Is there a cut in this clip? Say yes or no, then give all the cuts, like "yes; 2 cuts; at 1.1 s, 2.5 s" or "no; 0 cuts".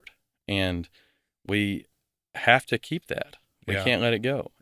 no; 0 cuts